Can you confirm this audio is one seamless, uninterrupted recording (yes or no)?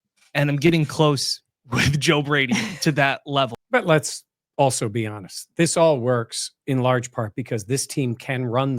no